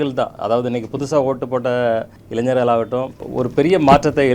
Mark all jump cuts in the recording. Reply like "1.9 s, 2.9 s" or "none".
2.2 s, 3.2 s